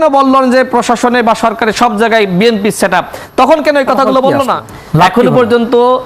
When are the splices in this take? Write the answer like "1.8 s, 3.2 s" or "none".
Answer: 4.6 s